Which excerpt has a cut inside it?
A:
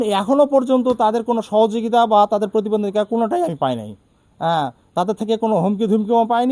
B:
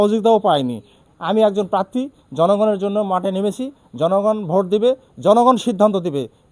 B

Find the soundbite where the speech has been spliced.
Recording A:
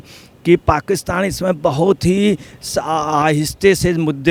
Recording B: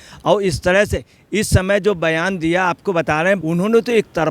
B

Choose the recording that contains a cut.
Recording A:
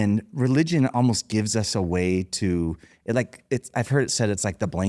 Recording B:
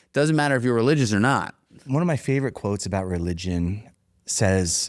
B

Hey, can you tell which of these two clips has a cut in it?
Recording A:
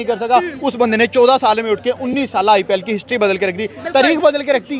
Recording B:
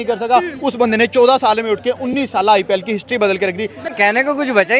B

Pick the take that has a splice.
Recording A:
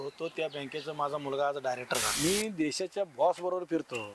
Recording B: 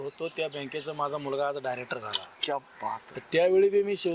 A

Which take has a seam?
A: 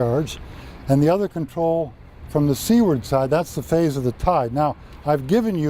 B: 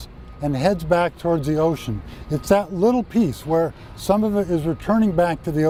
A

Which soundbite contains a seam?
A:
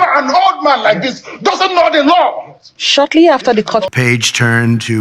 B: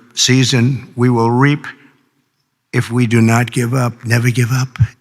A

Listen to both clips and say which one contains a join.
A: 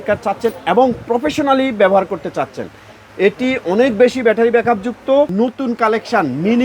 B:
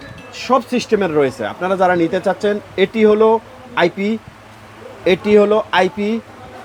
A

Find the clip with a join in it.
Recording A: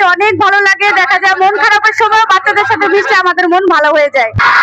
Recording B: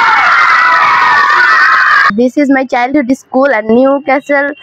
B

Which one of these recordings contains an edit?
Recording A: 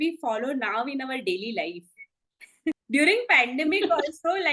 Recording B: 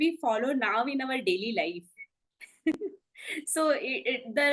A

